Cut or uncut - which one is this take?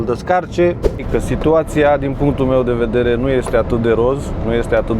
cut